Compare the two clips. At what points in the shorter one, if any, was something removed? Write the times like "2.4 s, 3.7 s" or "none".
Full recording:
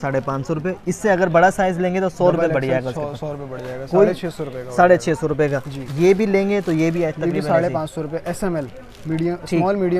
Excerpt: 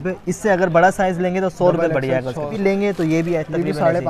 2.5 s